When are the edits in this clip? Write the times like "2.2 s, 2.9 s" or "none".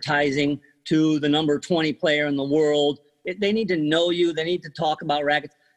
3.1 s